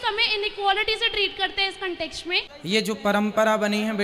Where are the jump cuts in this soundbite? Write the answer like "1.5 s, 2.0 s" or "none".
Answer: 2.5 s

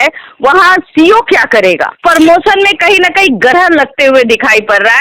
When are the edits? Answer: 2.0 s

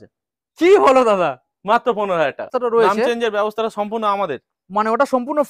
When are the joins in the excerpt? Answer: 2.5 s

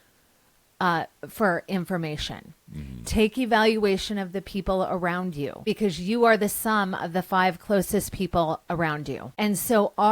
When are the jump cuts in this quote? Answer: 5.6 s, 9.2 s

